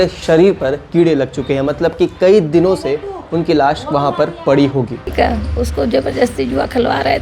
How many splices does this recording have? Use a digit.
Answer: 1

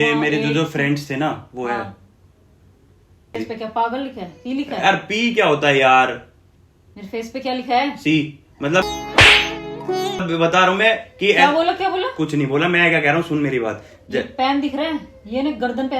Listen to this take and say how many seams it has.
1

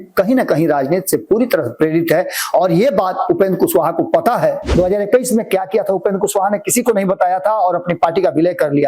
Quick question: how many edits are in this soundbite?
1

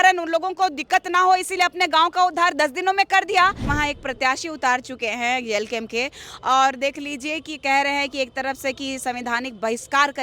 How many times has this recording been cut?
1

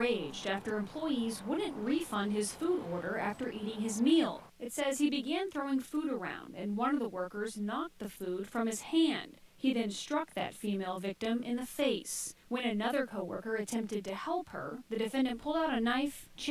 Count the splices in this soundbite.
3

